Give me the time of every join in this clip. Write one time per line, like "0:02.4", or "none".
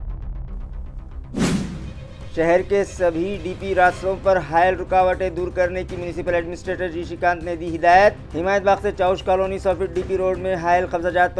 0:01.8